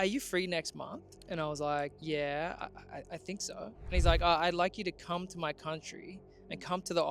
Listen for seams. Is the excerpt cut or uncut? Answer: cut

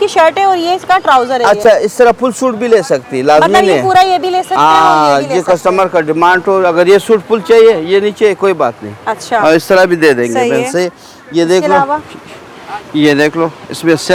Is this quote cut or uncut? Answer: uncut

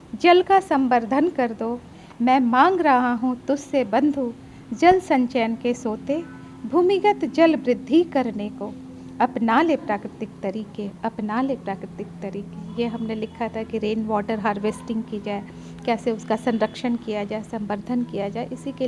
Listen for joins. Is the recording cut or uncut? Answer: uncut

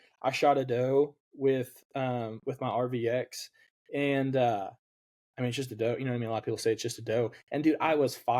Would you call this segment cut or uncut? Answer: uncut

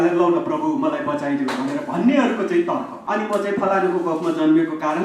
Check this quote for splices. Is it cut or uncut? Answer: cut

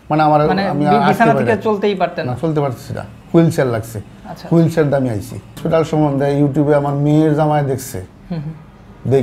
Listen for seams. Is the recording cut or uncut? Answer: cut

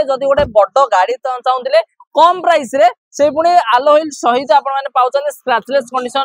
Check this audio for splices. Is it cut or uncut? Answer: uncut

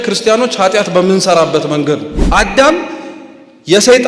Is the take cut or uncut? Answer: cut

